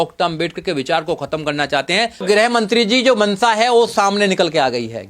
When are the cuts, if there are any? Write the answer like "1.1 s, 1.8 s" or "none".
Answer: 2.2 s